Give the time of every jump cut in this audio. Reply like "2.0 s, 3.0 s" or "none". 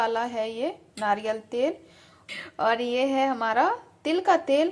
2.3 s